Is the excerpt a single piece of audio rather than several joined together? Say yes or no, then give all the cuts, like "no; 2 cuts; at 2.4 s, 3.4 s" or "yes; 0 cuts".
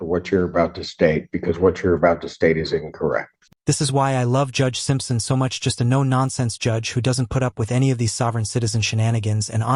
yes; 0 cuts